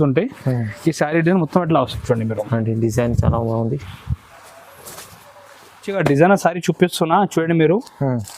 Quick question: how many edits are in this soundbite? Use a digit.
1